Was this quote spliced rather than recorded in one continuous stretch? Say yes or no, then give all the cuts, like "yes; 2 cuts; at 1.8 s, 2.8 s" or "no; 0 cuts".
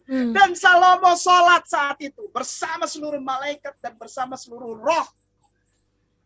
no; 0 cuts